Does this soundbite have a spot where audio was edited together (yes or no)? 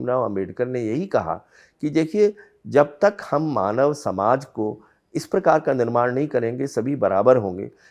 no